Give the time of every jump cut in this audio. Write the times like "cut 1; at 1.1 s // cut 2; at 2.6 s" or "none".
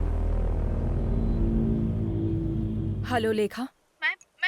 cut 1; at 3.0 s